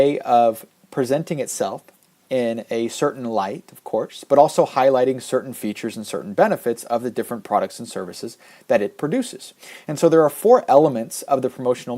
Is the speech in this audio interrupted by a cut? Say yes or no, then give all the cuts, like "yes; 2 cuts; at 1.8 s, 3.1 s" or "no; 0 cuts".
yes; 1 cut; at 5.9 s